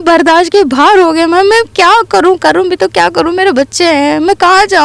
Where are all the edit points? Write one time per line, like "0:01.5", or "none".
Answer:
none